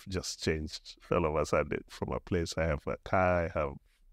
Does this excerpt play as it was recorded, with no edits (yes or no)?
no